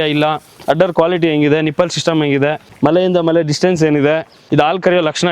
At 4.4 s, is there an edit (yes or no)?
yes